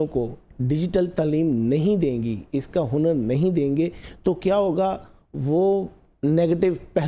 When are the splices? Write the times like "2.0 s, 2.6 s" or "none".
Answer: none